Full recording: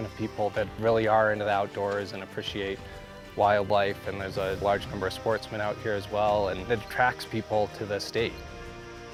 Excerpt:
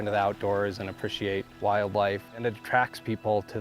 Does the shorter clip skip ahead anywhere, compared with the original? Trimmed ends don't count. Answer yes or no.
yes